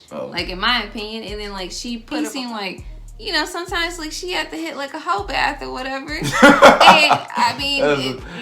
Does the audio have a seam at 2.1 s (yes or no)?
yes